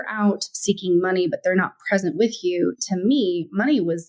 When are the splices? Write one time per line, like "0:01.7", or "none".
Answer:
none